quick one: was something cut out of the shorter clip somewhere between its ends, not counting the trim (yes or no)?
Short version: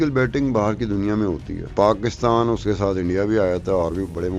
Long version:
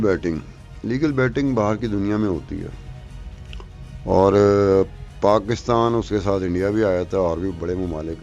yes